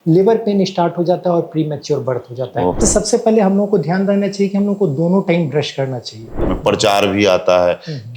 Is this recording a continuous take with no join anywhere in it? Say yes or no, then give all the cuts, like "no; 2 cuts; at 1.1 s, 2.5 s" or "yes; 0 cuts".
no; 2 cuts; at 2.8 s, 6.5 s